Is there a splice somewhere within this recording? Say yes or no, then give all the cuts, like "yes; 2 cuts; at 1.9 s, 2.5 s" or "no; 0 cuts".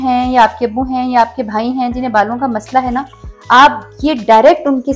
no; 0 cuts